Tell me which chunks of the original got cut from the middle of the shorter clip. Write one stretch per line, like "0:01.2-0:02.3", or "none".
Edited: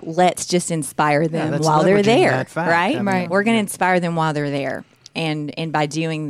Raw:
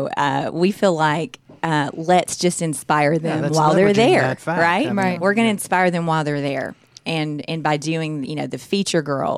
none